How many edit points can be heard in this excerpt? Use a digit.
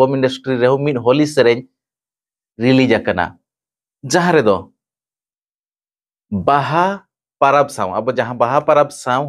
0